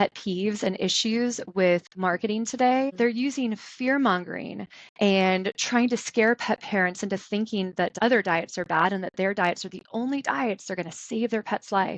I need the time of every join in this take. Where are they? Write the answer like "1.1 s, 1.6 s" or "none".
2.9 s, 7.9 s